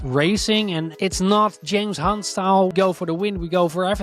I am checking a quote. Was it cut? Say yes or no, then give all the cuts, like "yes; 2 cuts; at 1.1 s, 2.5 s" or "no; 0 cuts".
yes; 2 cuts; at 0.9 s, 2.7 s